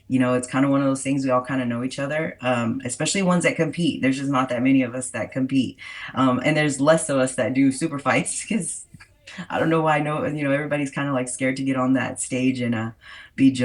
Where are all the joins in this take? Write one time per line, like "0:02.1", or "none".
none